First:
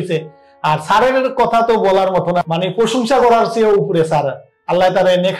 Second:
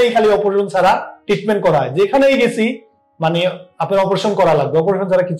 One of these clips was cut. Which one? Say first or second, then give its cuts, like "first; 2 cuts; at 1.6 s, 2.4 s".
first; 1 cut; at 2.4 s